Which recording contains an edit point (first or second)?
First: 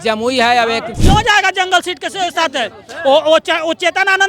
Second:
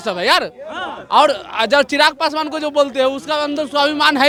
first